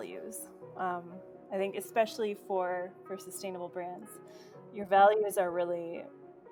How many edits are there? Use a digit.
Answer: 0